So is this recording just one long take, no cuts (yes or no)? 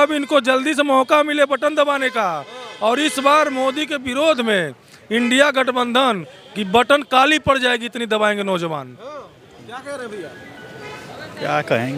yes